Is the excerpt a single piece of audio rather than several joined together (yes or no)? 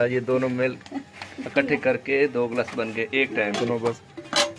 no